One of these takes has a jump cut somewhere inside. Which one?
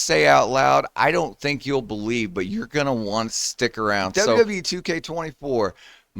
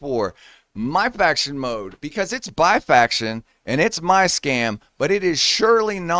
first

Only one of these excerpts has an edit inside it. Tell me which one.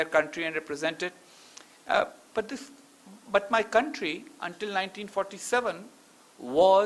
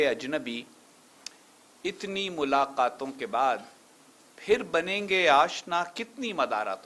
first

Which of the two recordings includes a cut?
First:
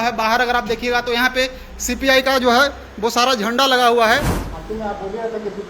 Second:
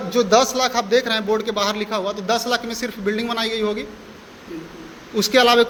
first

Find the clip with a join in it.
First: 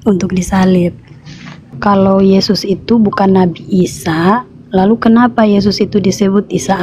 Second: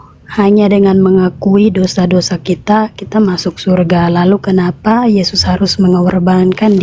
first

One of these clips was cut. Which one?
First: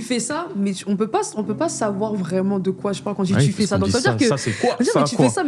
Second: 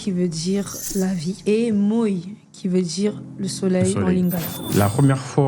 second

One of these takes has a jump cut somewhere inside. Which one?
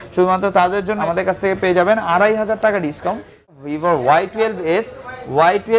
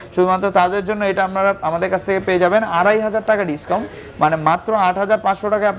first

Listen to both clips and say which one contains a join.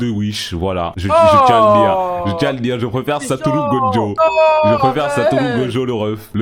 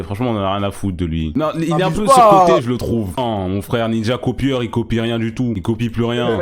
second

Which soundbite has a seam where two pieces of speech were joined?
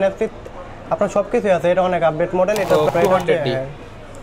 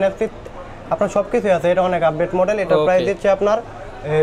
first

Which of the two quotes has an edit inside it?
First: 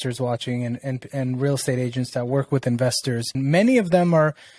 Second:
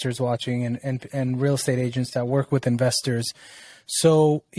first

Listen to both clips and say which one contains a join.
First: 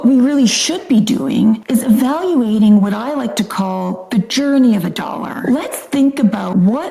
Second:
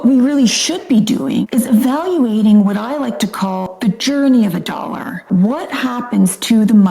second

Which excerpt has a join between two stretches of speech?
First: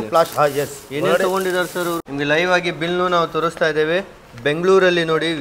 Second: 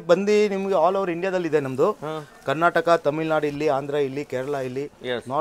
first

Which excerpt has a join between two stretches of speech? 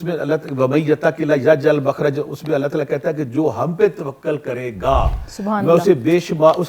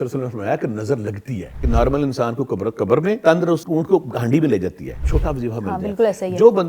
second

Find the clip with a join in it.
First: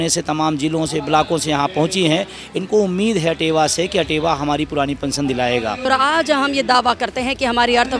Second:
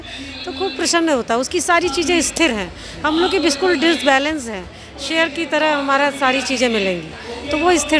first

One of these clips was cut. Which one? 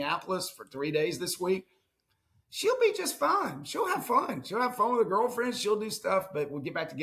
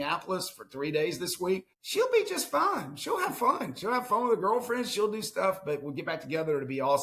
second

